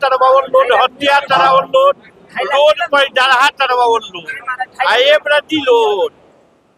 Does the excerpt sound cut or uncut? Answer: uncut